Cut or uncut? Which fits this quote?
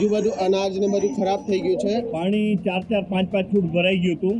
cut